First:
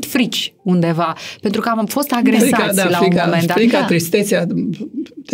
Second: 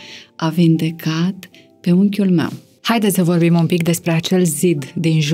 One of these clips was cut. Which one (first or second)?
second